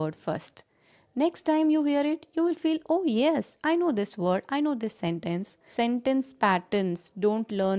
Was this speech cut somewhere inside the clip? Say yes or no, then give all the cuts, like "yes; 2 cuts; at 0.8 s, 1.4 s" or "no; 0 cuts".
yes; 1 cut; at 5.6 s